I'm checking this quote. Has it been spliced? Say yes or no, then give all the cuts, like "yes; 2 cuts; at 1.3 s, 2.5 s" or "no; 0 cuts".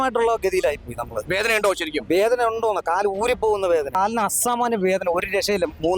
yes; 1 cut; at 3.9 s